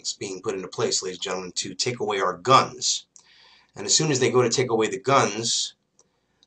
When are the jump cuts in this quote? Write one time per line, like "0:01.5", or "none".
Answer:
0:02.2